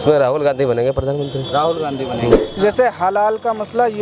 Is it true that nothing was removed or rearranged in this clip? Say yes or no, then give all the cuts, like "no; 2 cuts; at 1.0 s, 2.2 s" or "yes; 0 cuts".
no; 1 cut; at 2.4 s